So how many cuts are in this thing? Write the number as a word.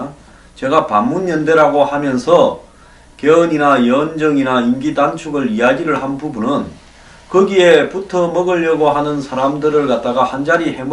one